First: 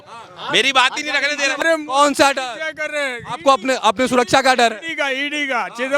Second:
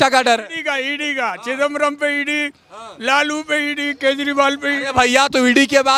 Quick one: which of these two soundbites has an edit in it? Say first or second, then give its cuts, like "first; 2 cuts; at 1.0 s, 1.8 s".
first; 1 cut; at 1.6 s